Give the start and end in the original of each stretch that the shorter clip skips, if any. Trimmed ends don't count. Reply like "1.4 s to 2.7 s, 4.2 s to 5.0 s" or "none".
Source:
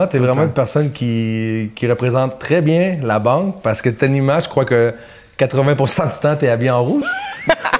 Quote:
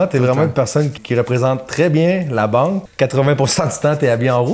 1.0 s to 1.7 s, 3.5 s to 5.2 s